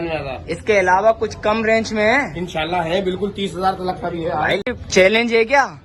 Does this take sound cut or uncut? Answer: cut